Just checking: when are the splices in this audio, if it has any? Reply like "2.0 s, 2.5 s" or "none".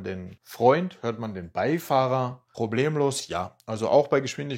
none

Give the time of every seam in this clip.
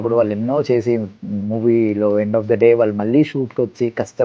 none

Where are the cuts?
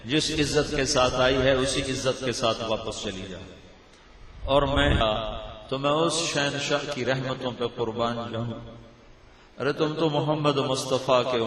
none

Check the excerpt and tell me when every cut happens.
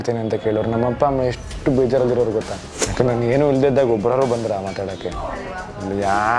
2.6 s

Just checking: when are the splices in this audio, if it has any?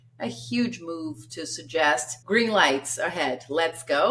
2.1 s

